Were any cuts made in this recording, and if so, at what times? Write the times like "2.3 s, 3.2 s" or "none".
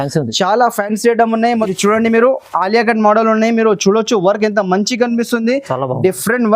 1.7 s